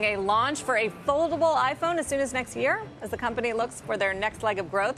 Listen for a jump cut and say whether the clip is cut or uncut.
uncut